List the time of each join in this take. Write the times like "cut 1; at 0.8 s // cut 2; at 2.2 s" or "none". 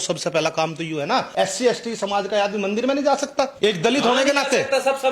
cut 1; at 1.3 s // cut 2; at 3.5 s